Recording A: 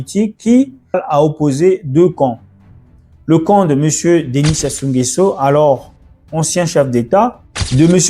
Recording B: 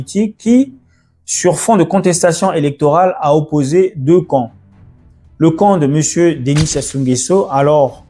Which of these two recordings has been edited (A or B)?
A